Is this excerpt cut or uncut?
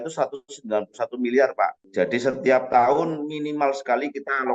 cut